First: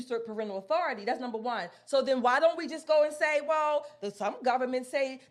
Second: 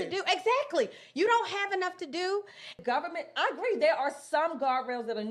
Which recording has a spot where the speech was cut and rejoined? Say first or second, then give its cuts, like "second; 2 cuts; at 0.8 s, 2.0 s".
second; 1 cut; at 2.8 s